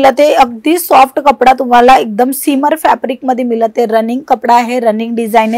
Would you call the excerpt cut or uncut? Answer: uncut